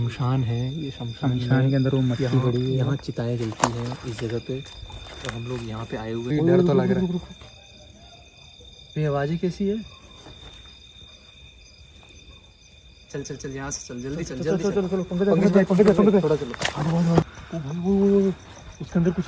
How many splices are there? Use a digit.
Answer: 2